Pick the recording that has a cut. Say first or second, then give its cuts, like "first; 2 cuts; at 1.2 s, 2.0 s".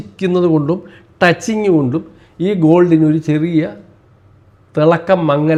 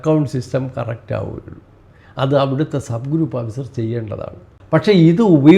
second; 1 cut; at 4.5 s